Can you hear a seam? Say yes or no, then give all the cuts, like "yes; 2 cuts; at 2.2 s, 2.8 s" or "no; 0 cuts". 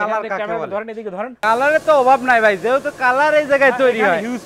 yes; 1 cut; at 1.4 s